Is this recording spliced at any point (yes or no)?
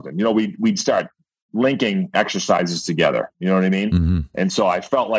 no